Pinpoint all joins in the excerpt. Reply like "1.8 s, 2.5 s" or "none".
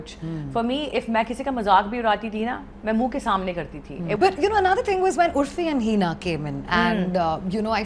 4.1 s